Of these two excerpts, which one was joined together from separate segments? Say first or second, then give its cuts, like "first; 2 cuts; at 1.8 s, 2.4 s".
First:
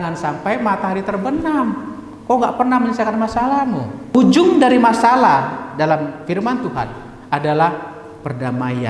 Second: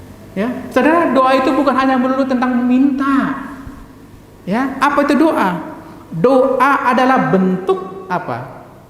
first; 1 cut; at 4.1 s